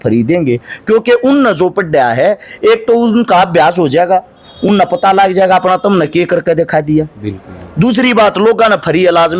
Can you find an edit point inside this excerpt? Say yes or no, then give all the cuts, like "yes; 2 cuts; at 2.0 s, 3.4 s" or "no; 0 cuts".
no; 0 cuts